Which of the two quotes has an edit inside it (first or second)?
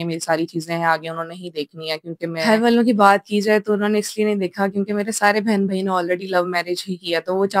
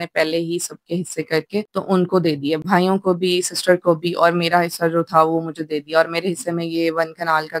first